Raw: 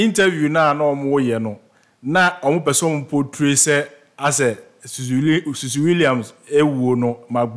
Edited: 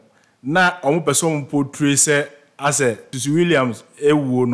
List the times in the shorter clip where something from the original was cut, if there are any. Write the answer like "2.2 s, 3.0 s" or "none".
3.1 s